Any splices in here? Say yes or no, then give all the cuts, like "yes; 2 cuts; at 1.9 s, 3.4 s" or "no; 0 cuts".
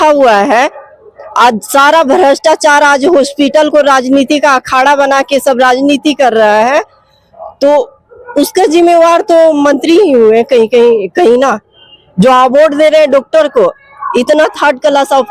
no; 0 cuts